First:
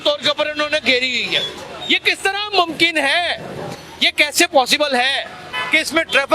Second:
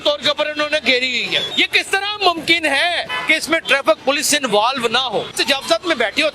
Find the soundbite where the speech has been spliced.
second; 3 cuts; at 1.5 s, 3.1 s, 5.3 s

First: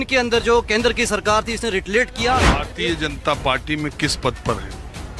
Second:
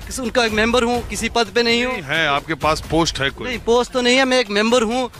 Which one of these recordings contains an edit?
first; 1 cut; at 2.6 s

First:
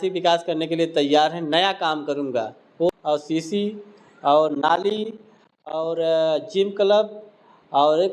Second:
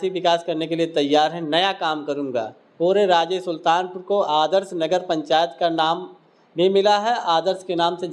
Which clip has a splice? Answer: first; 1 cut; at 2.9 s

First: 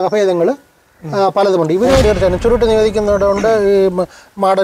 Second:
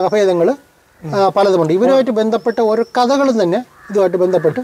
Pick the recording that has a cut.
first; 1 cut; at 2.0 s

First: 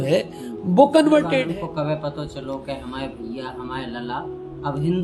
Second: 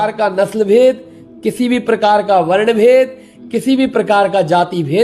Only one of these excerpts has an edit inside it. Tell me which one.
first; 1 cut; at 1.4 s

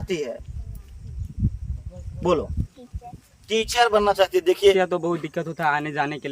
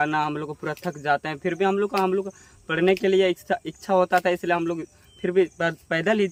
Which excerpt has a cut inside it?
first; 1 cut; at 4.6 s

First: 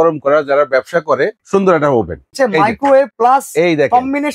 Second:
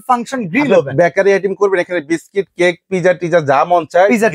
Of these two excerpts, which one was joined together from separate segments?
first; 3 cuts; at 1.4 s, 2.3 s, 3.1 s

